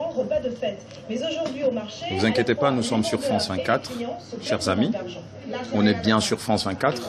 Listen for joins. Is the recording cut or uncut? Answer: uncut